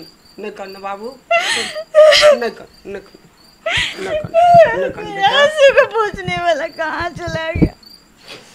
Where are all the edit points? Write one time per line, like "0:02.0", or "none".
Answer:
none